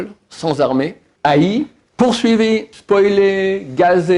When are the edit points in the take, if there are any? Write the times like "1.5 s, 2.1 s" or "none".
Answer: 1.0 s, 1.8 s, 2.7 s